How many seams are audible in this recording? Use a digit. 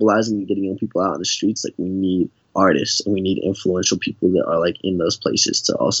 1